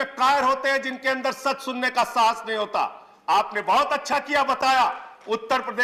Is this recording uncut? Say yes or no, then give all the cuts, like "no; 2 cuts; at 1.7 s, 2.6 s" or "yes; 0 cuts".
yes; 0 cuts